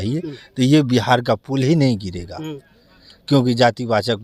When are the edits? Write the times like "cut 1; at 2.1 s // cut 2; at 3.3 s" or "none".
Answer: none